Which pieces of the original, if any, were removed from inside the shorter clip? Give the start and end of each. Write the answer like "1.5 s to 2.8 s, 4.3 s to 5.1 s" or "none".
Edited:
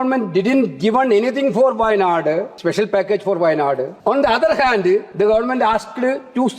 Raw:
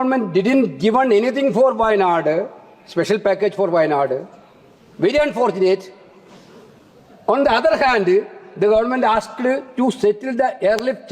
2.5 s to 2.8 s, 4.3 s to 7.2 s, 8.3 s to 8.5 s